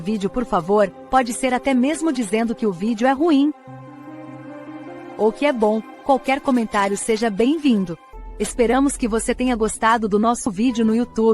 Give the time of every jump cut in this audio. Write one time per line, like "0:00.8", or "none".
0:08.0
0:10.5